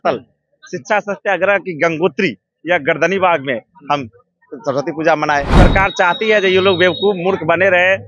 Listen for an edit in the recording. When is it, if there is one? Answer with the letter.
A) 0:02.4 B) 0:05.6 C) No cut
B